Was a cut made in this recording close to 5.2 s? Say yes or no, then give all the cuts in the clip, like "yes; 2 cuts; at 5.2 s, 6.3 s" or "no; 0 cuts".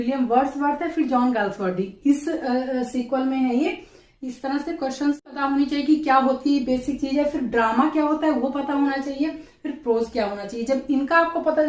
yes; 1 cut; at 5.2 s